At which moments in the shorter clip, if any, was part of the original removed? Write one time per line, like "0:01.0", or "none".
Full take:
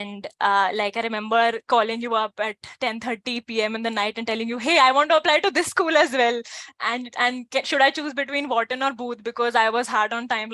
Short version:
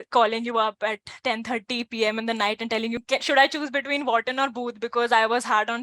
0:03.0

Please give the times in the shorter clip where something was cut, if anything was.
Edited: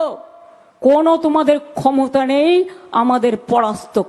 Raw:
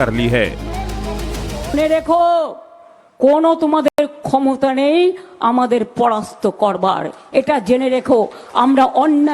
0:01.5

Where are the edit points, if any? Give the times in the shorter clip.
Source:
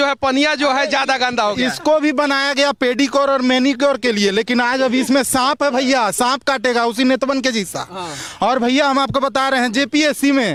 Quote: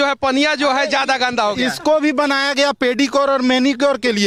none

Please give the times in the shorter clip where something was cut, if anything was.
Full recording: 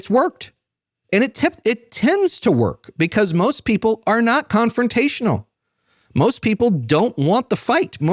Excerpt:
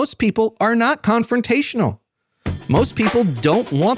none

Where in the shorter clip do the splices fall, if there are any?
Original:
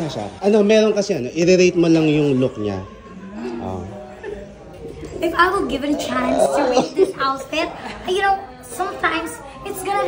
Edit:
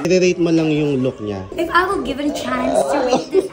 0:01.5

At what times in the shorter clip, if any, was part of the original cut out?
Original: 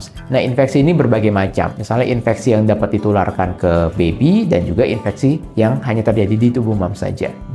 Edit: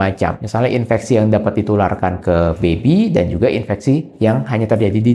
none

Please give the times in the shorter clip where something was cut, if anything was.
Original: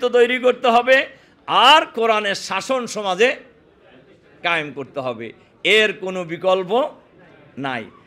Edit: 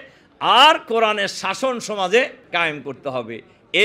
0:02.4

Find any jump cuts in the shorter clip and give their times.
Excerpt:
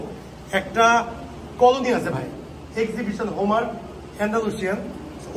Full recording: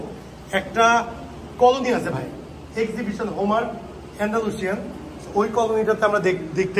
none

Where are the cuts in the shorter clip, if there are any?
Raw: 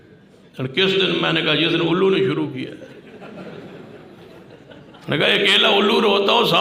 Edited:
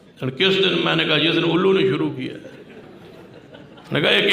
0:02.8

